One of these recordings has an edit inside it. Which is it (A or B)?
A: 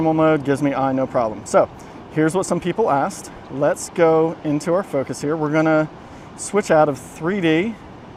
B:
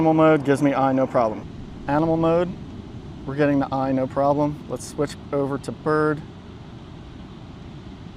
B